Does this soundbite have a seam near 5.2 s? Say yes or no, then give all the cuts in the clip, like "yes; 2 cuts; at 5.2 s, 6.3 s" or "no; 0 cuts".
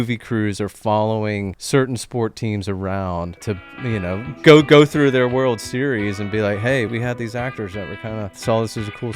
no; 4 cuts; at 1.5 s, 3.4 s, 6.9 s, 8.3 s